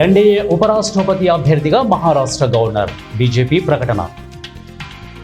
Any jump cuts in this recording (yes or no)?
yes